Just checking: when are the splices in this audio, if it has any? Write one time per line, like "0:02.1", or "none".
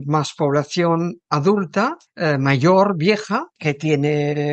0:02.0
0:03.5